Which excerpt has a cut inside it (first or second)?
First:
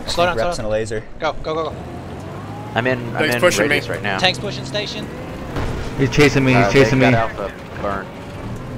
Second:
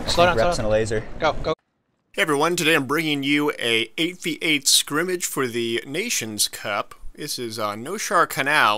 first